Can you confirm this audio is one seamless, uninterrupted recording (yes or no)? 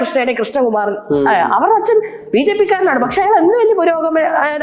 yes